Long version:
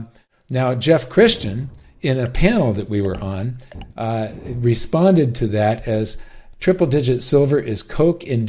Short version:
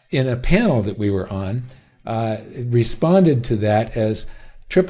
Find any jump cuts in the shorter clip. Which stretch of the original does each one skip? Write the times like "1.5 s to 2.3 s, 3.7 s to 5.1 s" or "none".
none